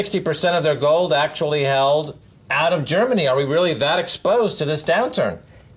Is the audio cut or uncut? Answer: cut